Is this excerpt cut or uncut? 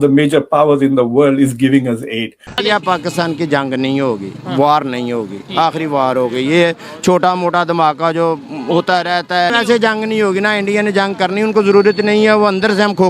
cut